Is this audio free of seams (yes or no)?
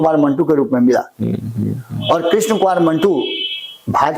yes